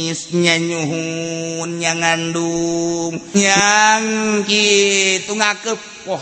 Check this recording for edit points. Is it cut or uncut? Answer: cut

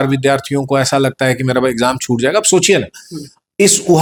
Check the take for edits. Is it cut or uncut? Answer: uncut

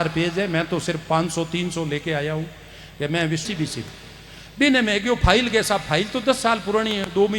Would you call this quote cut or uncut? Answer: cut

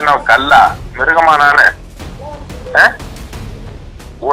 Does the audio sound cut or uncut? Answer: uncut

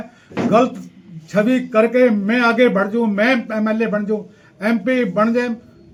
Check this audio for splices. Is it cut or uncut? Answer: uncut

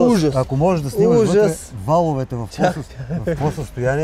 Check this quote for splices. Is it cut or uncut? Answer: uncut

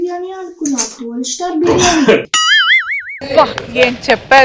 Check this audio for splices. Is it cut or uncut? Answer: uncut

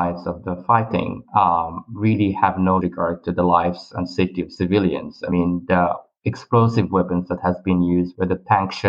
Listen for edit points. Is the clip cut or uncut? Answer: uncut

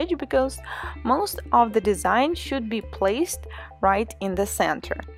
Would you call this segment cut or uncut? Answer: uncut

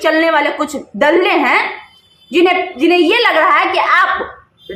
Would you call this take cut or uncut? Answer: uncut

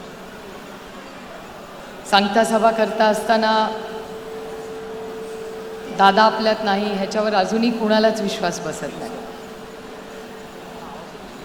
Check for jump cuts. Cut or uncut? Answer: uncut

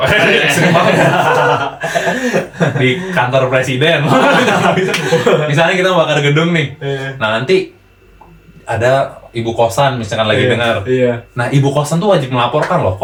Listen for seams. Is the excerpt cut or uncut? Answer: uncut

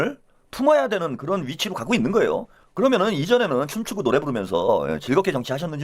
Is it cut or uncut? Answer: cut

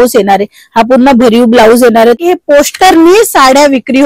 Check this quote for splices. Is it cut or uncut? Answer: cut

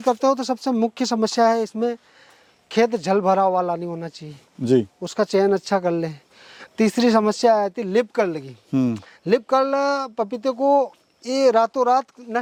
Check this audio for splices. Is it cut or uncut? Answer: uncut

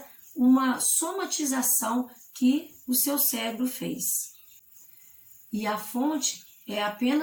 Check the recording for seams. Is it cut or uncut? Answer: uncut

